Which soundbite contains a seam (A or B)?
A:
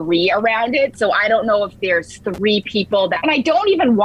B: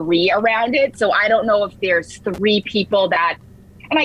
A